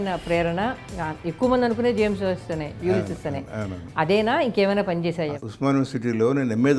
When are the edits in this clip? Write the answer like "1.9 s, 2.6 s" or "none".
5.3 s